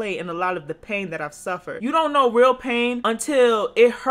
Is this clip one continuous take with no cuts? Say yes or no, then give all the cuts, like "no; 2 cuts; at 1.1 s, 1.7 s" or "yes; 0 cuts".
no; 2 cuts; at 1.7 s, 3.0 s